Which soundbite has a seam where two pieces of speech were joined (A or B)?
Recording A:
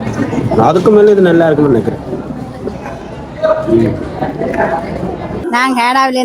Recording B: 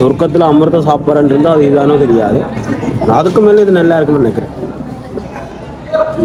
A